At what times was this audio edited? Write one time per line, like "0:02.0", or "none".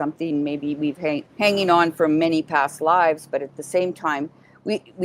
0:01.3